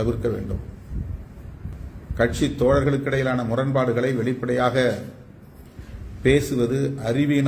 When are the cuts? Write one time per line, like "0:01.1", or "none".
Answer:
0:01.7